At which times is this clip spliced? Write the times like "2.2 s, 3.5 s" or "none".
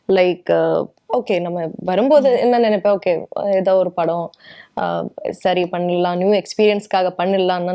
0.9 s